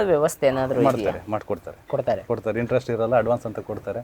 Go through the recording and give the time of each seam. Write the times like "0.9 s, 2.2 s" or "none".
none